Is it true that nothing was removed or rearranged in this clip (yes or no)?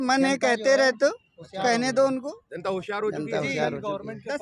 yes